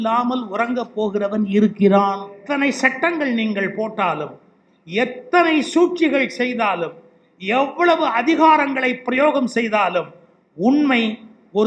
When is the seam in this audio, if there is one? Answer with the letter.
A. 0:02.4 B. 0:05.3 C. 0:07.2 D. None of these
A